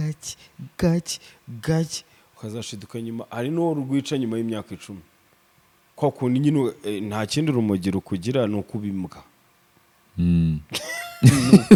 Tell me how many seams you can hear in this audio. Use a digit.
0